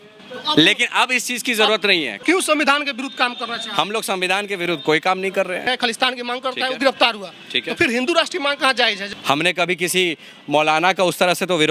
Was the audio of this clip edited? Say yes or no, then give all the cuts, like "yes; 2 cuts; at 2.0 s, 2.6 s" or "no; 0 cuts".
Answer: yes; 3 cuts; at 2.2 s, 5.7 s, 9.1 s